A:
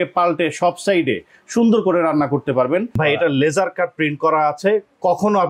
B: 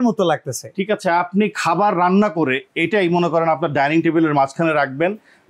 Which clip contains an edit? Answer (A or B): A